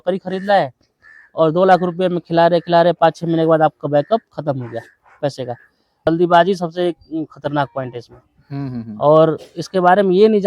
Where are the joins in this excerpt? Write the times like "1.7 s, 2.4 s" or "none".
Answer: 6.1 s